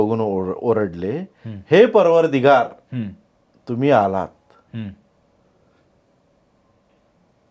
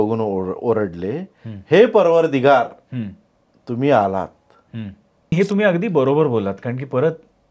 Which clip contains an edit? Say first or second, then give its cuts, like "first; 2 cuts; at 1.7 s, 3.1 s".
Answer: second; 1 cut; at 5.3 s